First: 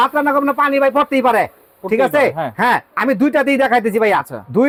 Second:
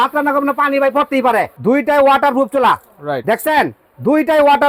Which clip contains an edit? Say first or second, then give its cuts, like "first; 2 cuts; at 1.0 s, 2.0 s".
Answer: second; 1 cut; at 1.5 s